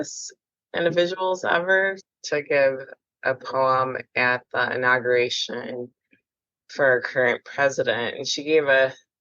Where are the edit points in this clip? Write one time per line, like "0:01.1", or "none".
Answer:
0:02.1